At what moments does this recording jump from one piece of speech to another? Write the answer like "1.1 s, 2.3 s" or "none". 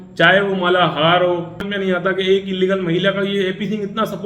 1.6 s